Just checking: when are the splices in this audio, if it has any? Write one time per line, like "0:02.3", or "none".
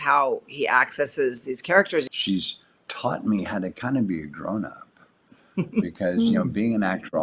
0:02.1